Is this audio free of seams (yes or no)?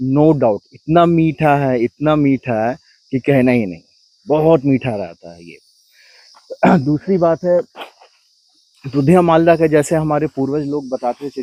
yes